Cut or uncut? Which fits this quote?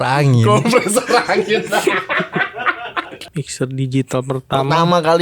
cut